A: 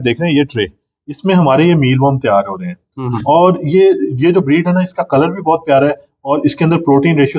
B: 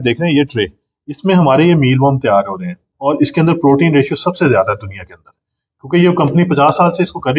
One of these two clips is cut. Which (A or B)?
B